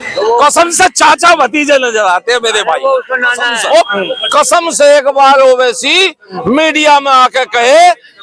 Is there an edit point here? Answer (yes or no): yes